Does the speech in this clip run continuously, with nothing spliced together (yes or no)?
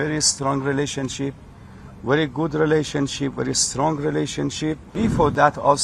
no